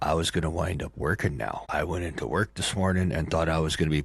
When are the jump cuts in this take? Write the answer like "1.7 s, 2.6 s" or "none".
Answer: 1.6 s